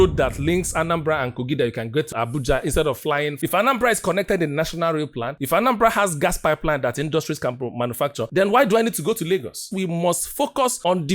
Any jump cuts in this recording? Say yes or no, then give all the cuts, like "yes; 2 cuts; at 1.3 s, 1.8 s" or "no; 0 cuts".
yes; 3 cuts; at 2.1 s, 3.4 s, 9.7 s